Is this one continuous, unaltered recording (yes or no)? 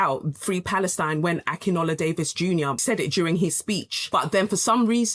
no